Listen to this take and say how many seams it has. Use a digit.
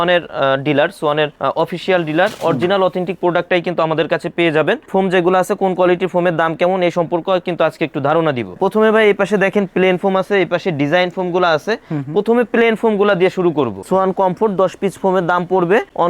2